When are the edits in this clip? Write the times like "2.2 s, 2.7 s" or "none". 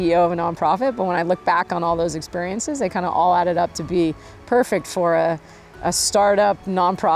none